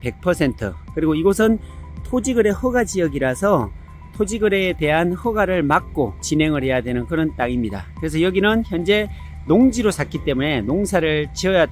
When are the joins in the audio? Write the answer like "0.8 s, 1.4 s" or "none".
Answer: none